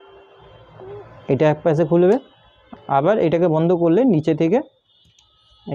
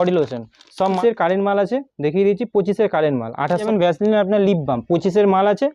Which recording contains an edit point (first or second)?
second